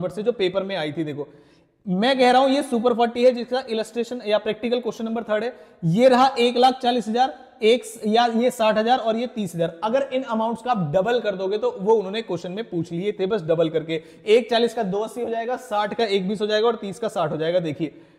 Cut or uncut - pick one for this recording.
uncut